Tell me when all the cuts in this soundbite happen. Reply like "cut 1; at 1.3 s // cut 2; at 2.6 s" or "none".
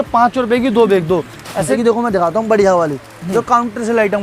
cut 1; at 1.8 s